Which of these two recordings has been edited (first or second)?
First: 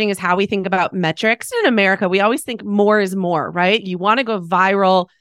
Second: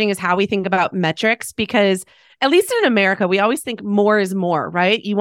first